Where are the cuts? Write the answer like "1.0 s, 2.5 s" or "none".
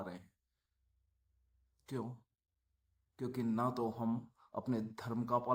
none